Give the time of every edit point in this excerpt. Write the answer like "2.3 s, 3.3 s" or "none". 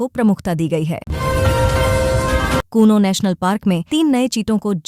1.0 s, 2.6 s